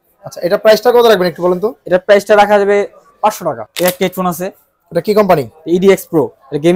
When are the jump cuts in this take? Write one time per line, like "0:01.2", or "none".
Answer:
0:03.7